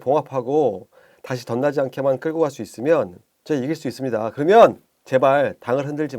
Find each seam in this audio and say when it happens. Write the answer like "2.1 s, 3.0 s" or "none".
3.3 s, 4.9 s